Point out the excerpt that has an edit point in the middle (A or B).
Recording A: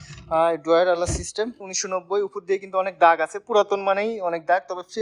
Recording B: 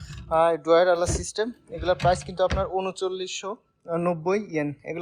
A